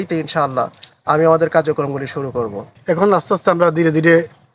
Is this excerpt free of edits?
no; 1 cut; at 2.7 s

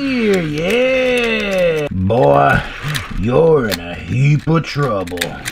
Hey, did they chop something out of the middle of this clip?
yes; 1 cut; at 1.9 s

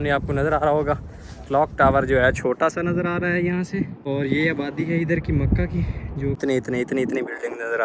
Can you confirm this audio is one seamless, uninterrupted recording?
no; 2 cuts; at 4.0 s, 6.4 s

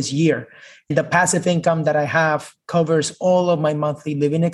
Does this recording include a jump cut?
yes; 1 cut; at 0.9 s

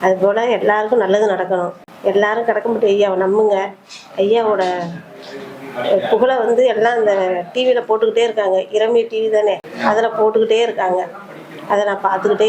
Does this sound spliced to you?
yes; 2 cuts; at 1.8 s, 9.7 s

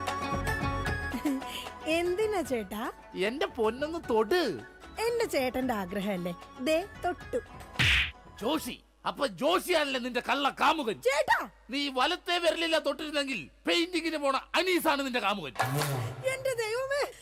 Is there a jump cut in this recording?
no; 0 cuts

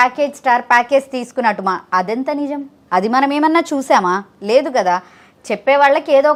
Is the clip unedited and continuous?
yes; 0 cuts

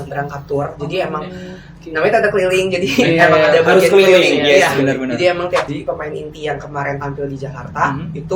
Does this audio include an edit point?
yes; 1 cut; at 5.7 s

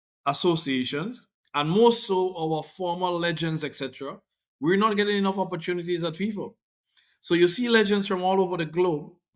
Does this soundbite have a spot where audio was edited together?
no; 0 cuts

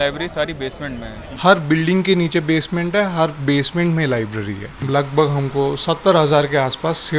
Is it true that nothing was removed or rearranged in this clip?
no; 2 cuts; at 1.2 s, 4.7 s

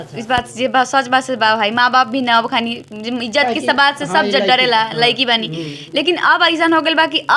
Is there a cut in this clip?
no; 0 cuts

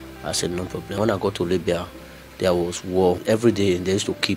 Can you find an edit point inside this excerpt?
yes; 2 cuts; at 1.0 s, 3.2 s

